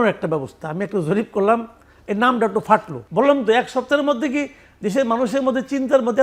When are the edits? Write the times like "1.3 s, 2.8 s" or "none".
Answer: 3.0 s